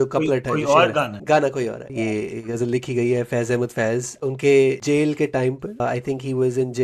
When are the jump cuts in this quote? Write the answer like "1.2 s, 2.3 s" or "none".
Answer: 1.2 s, 1.8 s, 4.1 s, 4.8 s, 5.8 s